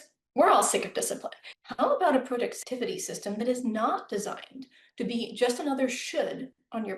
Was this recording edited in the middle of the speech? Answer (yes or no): yes